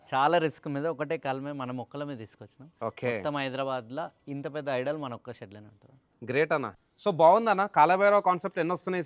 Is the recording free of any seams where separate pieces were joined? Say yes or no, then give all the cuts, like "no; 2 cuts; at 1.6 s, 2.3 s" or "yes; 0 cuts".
no; 1 cut; at 6.8 s